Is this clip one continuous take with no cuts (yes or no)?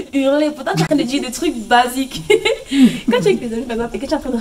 yes